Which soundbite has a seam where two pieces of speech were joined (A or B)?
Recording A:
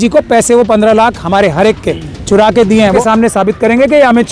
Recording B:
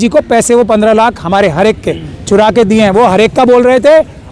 A